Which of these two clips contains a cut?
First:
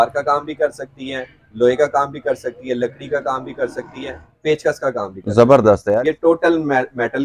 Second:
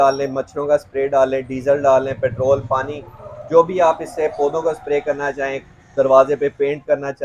first; 2 cuts; at 4.3 s, 5.9 s

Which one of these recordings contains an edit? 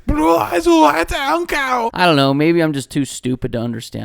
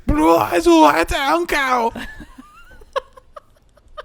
first; 1 cut; at 1.9 s

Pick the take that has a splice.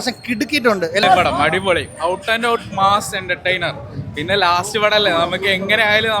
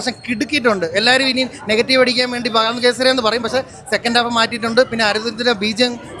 first; 1 cut; at 1.0 s

